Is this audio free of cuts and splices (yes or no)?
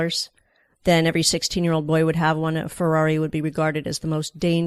yes